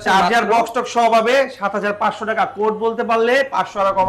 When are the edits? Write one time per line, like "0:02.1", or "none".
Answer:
none